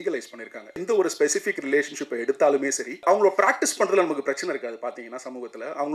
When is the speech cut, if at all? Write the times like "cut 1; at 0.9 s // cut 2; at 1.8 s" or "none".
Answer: cut 1; at 0.8 s // cut 2; at 3.0 s

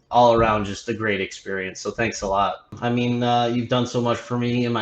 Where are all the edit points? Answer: cut 1; at 2.8 s

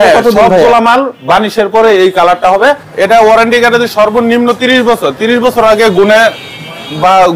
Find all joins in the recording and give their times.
cut 1; at 2.9 s

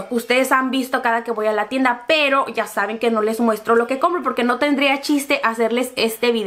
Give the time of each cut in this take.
none

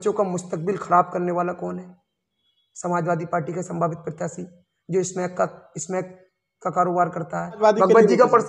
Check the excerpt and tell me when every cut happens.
cut 1; at 7.6 s

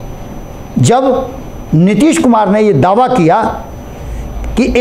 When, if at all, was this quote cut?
none

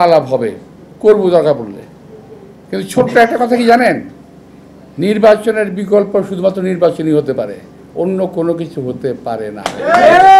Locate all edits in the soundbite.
none

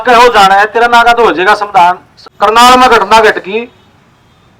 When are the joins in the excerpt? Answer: cut 1; at 2.1 s

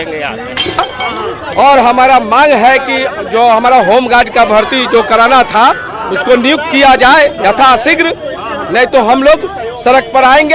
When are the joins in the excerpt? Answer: cut 1; at 0.9 s

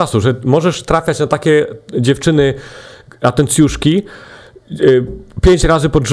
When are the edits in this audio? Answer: none

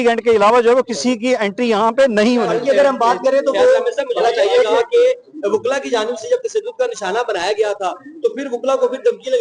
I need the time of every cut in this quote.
cut 1; at 2.5 s

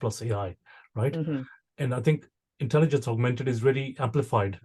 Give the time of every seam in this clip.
cut 1; at 1.6 s

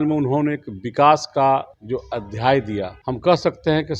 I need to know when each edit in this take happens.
cut 1; at 1.8 s // cut 2; at 3.0 s

